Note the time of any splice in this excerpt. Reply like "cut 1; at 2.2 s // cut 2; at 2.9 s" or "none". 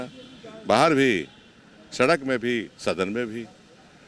none